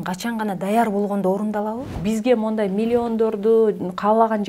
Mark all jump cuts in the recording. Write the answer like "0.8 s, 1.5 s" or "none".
1.8 s